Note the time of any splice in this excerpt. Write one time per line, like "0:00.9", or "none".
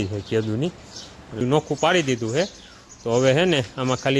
0:01.4